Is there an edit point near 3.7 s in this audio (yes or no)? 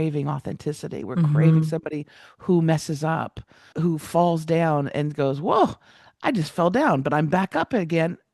yes